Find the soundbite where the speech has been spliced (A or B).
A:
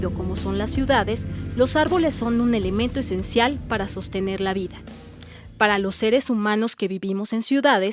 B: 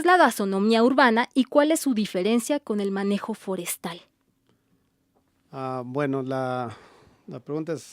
B